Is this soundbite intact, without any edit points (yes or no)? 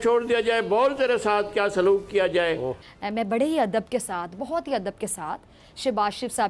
no